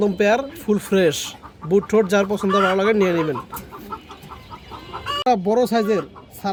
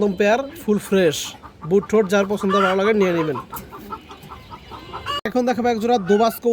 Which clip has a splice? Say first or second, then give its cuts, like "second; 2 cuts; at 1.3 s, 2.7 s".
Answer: second; 1 cut; at 5.1 s